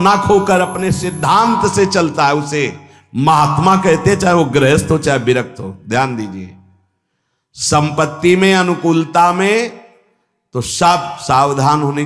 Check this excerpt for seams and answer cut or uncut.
uncut